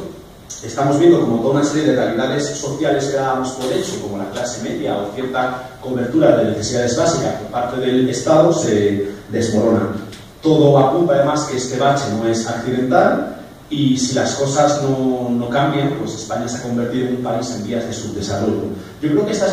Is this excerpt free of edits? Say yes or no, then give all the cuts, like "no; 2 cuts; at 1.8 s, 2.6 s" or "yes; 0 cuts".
yes; 0 cuts